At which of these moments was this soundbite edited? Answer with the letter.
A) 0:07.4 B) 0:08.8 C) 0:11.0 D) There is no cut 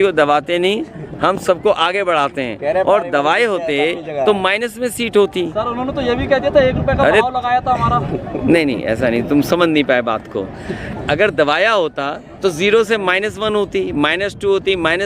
C